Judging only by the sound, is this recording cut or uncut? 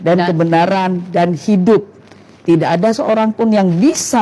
uncut